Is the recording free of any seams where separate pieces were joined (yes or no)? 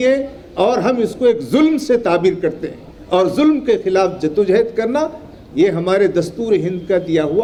yes